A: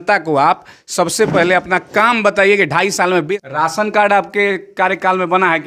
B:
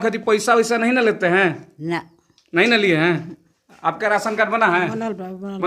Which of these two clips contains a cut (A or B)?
A